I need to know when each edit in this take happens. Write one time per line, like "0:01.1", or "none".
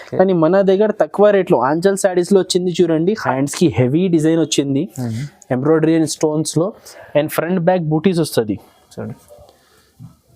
0:03.3